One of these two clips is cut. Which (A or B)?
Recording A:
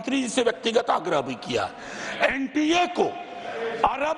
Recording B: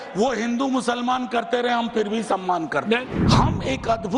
B